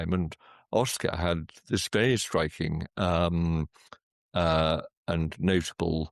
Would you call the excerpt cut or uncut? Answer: uncut